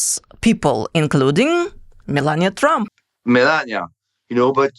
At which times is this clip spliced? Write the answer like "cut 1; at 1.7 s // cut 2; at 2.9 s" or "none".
cut 1; at 2.9 s